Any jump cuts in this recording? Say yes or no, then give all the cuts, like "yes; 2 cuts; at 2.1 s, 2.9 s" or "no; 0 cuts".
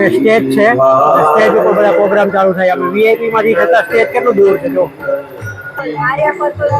yes; 1 cut; at 5.8 s